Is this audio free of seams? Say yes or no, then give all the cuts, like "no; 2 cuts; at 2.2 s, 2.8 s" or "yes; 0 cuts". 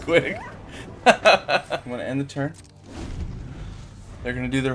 no; 1 cut; at 1.8 s